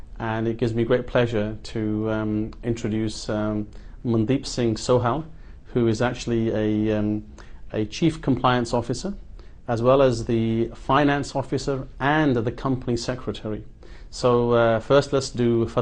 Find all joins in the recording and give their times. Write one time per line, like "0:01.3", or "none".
0:02.5